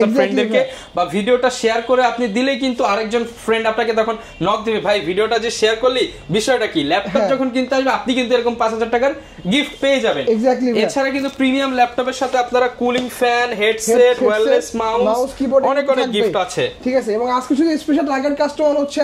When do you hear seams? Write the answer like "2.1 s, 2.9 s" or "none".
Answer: none